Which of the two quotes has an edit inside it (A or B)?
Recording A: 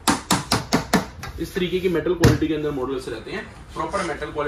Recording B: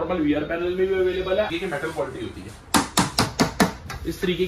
B